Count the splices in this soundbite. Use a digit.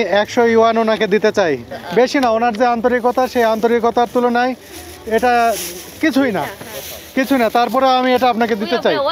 1